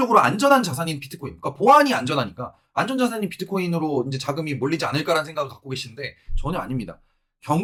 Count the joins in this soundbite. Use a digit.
0